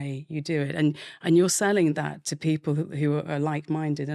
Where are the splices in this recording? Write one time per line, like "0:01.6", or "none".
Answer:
none